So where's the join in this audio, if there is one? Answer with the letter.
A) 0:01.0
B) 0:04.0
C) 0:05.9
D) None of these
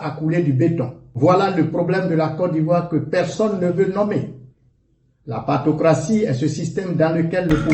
A